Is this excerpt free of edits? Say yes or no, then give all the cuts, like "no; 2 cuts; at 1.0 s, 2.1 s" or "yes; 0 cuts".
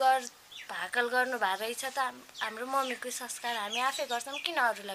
yes; 0 cuts